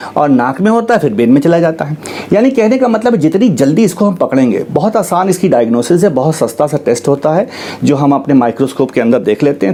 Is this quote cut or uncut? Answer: uncut